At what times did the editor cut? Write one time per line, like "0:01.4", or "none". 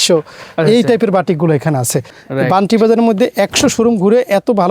0:02.0